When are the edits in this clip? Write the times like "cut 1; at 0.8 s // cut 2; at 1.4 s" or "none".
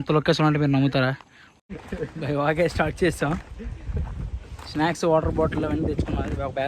cut 1; at 1.7 s